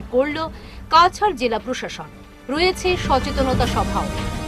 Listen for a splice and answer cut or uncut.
uncut